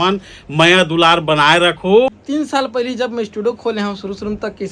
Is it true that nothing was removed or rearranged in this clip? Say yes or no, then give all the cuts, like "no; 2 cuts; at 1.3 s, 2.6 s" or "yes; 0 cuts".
no; 1 cut; at 2.1 s